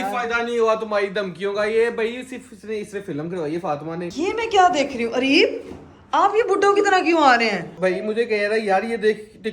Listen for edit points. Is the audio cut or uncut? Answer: cut